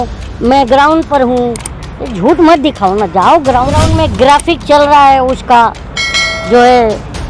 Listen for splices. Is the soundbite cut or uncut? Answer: cut